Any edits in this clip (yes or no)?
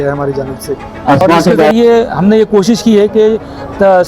yes